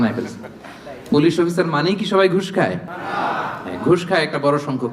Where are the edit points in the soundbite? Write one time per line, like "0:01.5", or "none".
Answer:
none